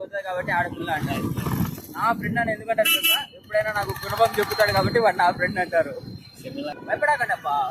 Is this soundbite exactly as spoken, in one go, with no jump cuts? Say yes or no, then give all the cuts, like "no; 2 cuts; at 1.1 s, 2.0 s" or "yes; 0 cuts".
no; 1 cut; at 6.7 s